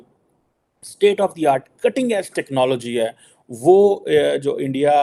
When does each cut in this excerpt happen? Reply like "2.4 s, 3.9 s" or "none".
none